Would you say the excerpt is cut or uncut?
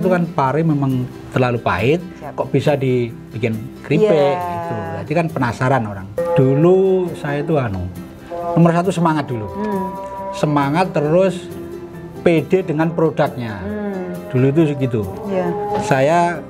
cut